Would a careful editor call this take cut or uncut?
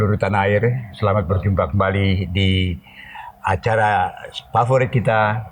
uncut